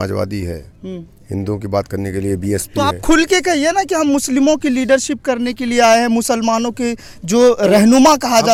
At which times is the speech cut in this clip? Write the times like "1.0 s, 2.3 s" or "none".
none